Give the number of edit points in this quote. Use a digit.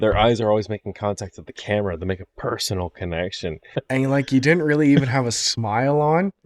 1